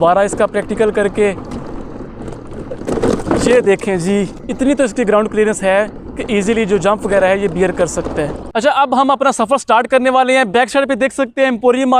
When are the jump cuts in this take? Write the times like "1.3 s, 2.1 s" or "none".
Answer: 8.4 s